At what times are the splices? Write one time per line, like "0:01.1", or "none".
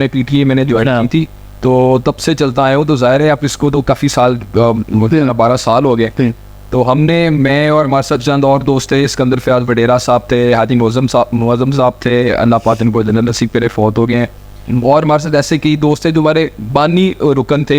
none